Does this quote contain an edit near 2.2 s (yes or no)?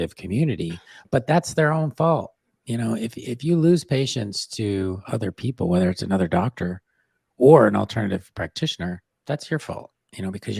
no